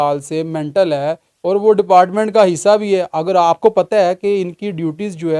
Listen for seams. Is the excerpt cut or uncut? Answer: uncut